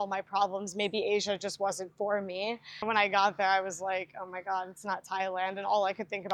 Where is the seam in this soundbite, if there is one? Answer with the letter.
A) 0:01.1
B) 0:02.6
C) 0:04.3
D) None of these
D